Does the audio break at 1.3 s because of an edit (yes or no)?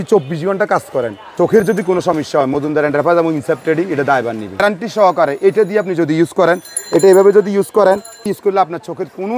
yes